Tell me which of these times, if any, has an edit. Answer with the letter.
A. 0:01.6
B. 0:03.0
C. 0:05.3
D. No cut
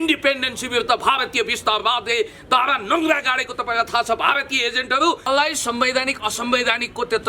C